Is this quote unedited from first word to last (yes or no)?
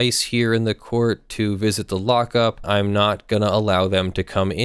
no